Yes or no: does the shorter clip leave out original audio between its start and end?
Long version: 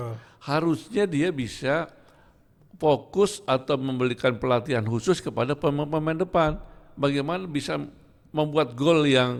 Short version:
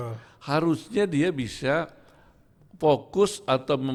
no